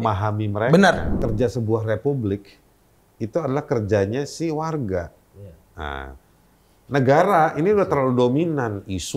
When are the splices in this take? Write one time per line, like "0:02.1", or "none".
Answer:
0:01.1